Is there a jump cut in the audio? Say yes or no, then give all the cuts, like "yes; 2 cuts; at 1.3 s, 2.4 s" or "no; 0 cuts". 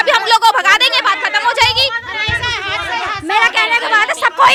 no; 0 cuts